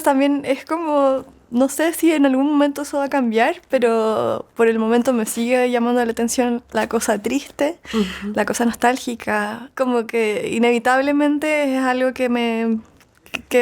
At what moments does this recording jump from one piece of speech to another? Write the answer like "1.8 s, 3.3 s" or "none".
9.7 s